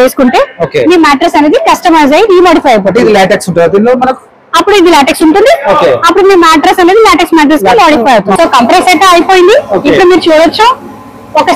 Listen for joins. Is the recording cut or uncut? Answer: cut